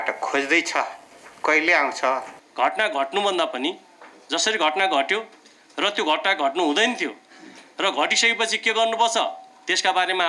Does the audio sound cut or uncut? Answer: cut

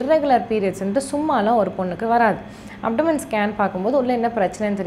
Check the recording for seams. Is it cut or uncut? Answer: uncut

